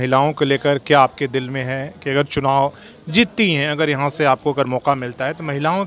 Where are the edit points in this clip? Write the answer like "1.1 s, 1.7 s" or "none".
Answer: none